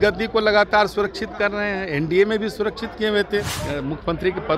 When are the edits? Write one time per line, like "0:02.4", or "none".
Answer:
0:03.6